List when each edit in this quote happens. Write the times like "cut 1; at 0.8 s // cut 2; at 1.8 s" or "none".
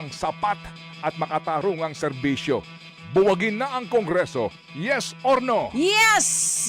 none